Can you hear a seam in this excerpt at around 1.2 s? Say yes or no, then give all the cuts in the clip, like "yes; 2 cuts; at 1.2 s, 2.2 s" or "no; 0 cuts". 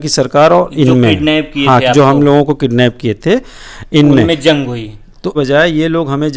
no; 1 cut; at 5.3 s